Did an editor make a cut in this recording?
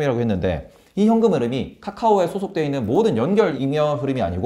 yes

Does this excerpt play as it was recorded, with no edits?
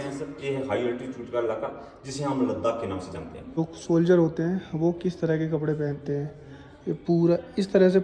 no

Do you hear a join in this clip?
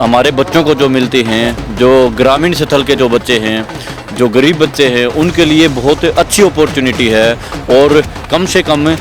no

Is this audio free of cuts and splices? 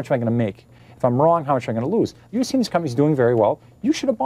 no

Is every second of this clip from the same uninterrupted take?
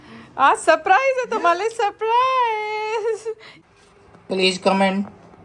no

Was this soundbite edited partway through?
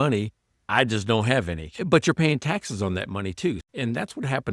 yes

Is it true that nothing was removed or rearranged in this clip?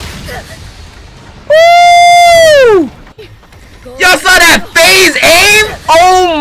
yes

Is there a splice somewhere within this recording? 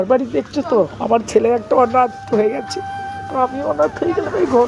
no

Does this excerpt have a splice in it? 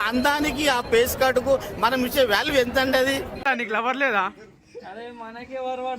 yes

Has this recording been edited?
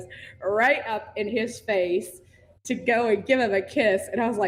no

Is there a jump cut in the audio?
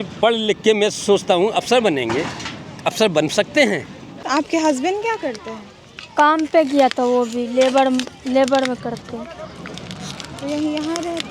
no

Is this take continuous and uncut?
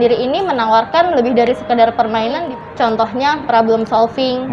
no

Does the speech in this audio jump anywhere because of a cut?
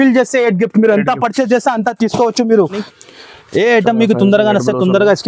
yes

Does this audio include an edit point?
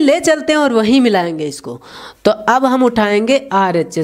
no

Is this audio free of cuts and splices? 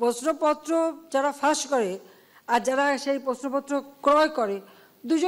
yes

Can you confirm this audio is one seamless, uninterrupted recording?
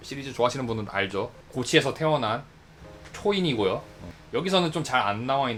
yes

